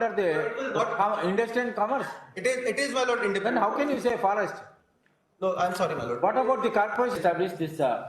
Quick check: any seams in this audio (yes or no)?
yes